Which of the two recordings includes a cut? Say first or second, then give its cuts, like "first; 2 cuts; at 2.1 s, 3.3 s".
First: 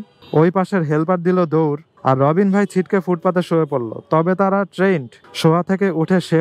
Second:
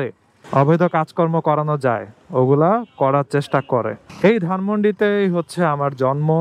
second; 1 cut; at 4.0 s